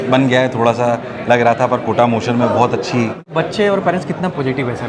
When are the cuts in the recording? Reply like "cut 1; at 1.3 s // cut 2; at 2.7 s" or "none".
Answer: cut 1; at 3.2 s